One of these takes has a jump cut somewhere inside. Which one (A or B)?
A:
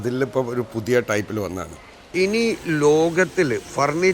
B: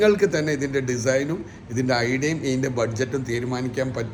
A